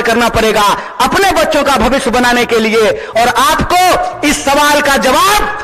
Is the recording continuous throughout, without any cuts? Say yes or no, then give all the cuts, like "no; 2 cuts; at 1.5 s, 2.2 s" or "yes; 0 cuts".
yes; 0 cuts